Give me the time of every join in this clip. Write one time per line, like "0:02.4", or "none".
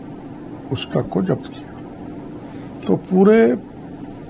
none